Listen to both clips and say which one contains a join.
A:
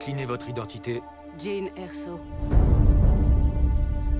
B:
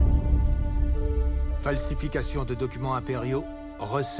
A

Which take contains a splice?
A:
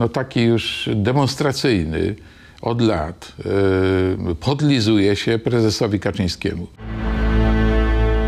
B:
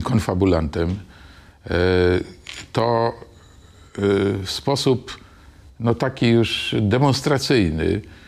A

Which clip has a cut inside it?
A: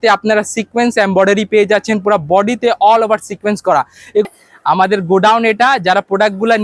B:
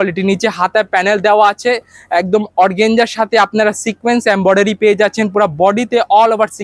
A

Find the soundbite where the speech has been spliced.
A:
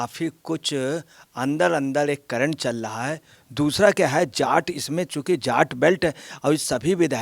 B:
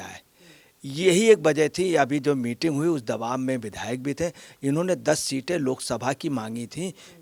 A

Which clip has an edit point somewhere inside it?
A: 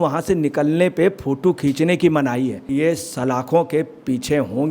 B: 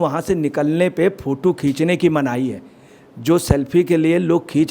A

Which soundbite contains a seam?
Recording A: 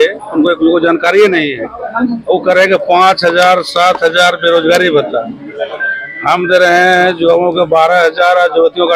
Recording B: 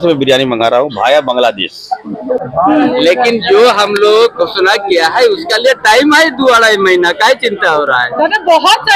B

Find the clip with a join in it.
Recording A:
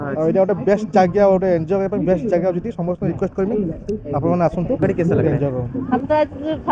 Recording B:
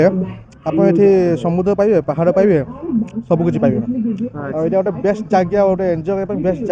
A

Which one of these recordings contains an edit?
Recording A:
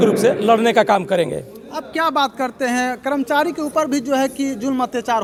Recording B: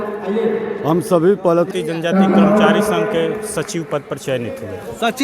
B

